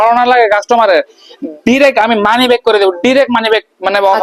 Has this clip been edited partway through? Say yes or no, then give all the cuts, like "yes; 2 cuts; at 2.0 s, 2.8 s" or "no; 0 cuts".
no; 0 cuts